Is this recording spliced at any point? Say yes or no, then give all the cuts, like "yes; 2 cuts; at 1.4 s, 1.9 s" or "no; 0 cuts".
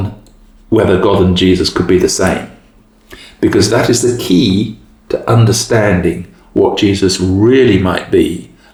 no; 0 cuts